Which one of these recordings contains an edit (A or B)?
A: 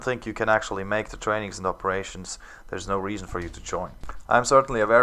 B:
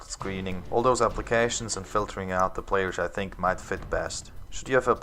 B